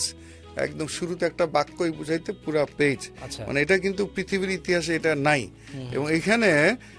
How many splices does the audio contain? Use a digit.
0